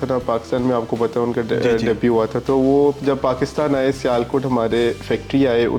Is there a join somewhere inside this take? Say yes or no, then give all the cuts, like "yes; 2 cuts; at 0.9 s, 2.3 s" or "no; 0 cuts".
no; 0 cuts